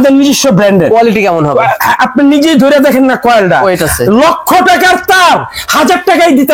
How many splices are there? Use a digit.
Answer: 0